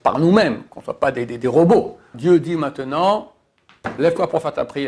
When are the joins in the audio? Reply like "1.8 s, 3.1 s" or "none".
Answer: 2.1 s